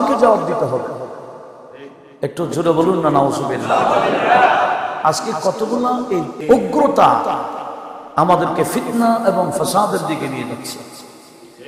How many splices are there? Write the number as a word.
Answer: one